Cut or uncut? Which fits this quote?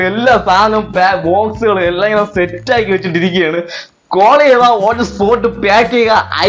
uncut